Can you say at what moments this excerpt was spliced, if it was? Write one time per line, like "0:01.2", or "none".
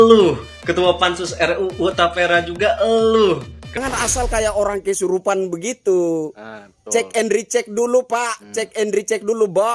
0:03.8